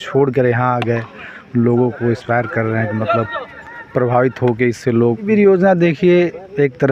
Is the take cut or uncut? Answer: cut